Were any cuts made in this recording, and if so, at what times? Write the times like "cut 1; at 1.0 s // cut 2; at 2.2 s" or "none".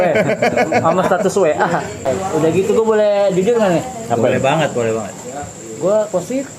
cut 1; at 2.1 s